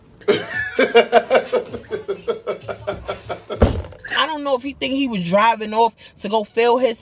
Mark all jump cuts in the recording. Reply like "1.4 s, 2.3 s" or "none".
4.1 s